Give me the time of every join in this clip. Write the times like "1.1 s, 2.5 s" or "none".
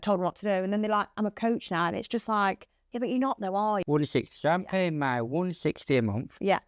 3.8 s